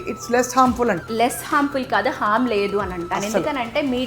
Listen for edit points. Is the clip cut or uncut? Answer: cut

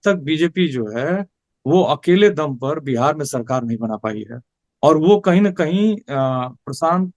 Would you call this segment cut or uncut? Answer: uncut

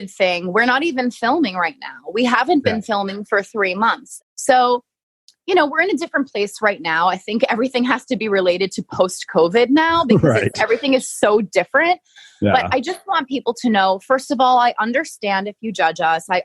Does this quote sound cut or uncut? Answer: cut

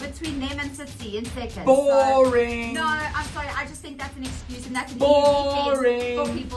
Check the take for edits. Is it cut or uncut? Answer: uncut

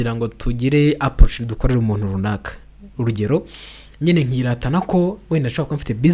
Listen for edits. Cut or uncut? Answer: uncut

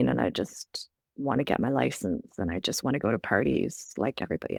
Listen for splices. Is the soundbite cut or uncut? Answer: uncut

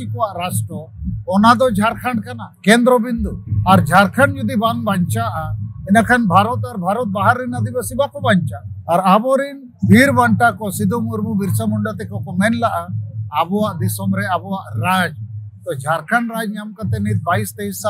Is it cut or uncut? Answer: uncut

